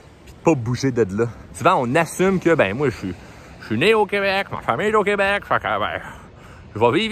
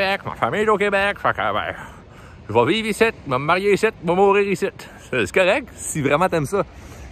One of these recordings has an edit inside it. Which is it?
first; 1 cut; at 1.4 s

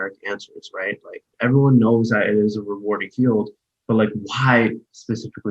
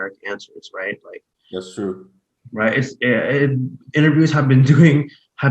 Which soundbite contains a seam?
first; 1 cut; at 1.2 s

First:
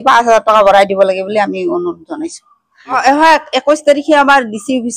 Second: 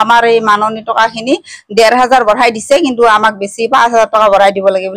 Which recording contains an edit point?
first; 1 cut; at 2.7 s

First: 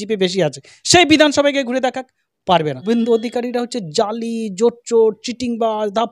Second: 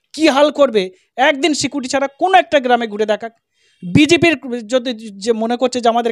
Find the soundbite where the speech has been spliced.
first; 1 cut; at 2.8 s

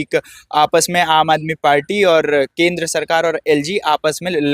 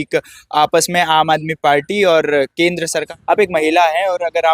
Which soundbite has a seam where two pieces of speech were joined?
second; 1 cut; at 3.1 s

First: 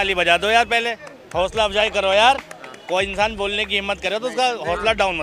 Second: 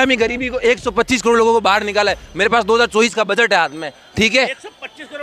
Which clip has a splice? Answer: second; 1 cut; at 4.2 s

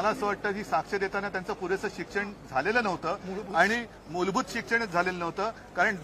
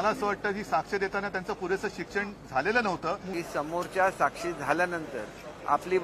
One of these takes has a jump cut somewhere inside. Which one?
second; 1 cut; at 3.3 s

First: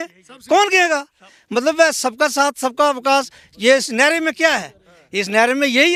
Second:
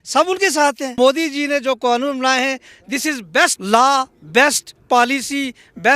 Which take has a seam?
second; 2 cuts; at 1.0 s, 3.6 s

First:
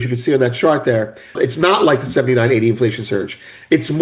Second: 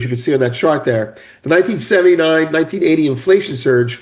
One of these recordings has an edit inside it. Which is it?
first; 1 cut; at 1.3 s

